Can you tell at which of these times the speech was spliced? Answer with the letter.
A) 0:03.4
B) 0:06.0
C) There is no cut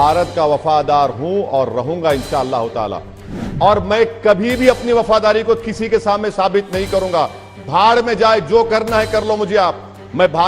A